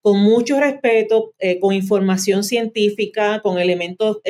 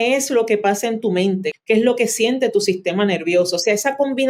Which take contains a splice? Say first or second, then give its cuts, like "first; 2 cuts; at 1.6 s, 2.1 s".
second; 1 cut; at 1.5 s